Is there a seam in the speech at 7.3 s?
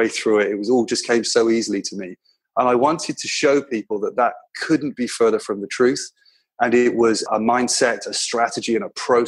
yes; 1 cut; at 7.3 s

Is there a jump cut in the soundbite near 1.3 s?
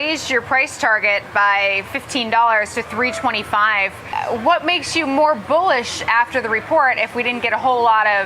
no; 1 cut; at 4.0 s

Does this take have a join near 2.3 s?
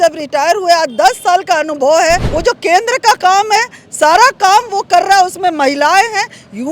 yes; 1 cut; at 2.3 s

